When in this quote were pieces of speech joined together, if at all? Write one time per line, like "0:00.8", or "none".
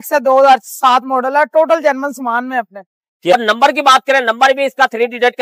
0:03.3